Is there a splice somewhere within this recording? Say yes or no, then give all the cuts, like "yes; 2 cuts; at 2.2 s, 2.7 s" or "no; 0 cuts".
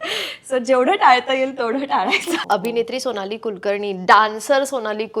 yes; 1 cut; at 2.4 s